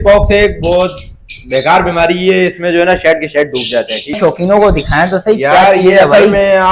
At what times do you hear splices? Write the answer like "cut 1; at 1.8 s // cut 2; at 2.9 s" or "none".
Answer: cut 1; at 4.2 s